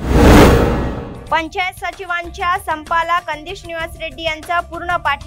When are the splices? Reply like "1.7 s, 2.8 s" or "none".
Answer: 1.2 s